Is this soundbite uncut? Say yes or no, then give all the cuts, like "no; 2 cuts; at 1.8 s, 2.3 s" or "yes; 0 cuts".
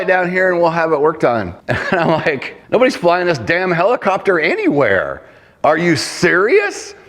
no; 2 cuts; at 1.6 s, 2.5 s